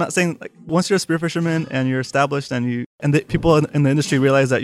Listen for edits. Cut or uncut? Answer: cut